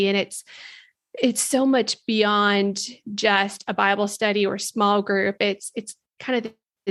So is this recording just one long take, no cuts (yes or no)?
yes